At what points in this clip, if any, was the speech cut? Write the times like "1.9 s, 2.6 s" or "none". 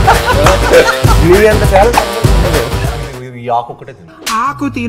2.9 s